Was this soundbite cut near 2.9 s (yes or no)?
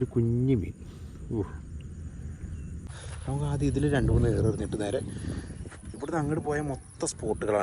yes